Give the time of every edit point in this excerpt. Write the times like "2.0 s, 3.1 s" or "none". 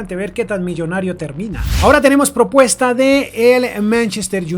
1.6 s